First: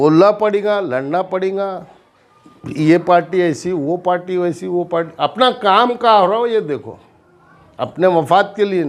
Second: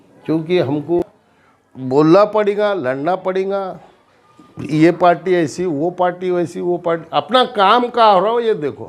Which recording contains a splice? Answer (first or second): second